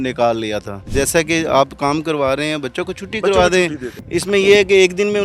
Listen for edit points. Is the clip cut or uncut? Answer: cut